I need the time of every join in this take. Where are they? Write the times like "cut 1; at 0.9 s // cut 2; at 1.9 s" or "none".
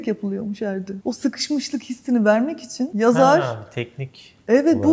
none